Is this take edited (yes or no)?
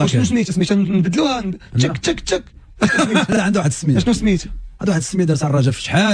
no